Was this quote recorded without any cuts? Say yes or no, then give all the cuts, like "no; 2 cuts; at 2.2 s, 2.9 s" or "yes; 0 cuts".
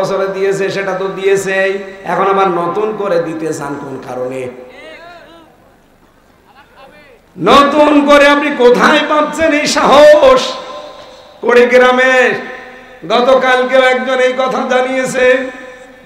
yes; 0 cuts